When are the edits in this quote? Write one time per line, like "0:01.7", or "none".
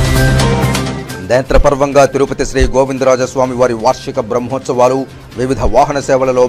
0:01.0